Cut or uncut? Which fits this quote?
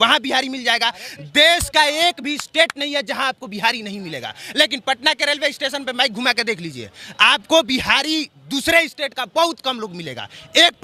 uncut